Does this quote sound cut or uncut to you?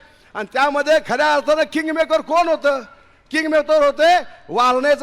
uncut